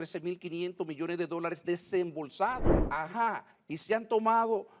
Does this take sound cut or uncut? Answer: cut